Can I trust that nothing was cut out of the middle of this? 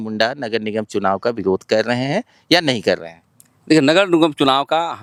yes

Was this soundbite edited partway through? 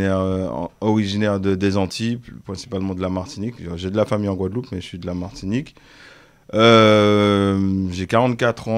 no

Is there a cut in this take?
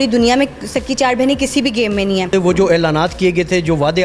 yes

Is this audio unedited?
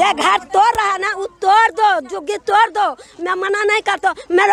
yes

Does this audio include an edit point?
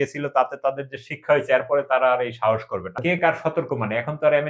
yes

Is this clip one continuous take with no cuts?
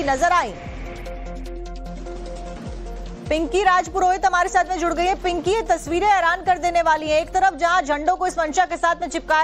yes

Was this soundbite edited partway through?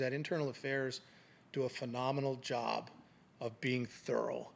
no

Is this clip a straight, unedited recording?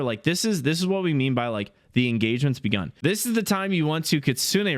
no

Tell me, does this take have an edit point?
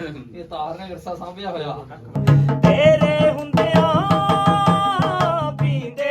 yes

